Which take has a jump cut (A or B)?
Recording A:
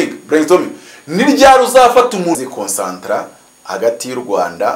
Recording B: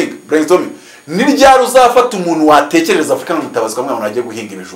A